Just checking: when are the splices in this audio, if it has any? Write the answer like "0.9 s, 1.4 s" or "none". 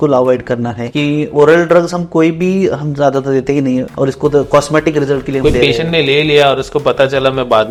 none